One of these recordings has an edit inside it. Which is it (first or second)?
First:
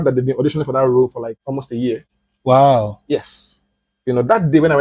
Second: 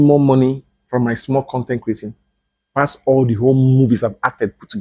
first